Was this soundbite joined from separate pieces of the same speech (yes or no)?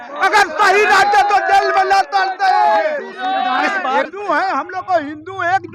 yes